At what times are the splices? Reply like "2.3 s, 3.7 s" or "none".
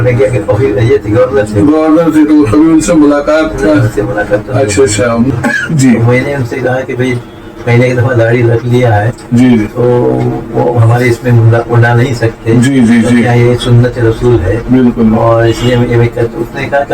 5.3 s